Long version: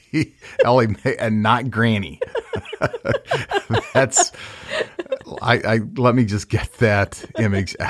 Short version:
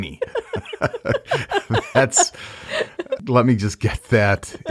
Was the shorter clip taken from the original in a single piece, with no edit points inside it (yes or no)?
no